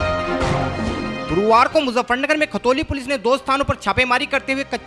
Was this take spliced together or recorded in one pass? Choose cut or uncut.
uncut